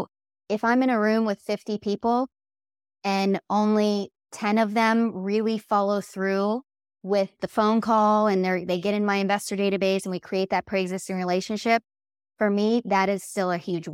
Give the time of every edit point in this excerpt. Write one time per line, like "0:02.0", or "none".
0:07.4